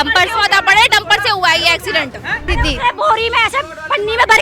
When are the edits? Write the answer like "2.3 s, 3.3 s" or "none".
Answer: 2.5 s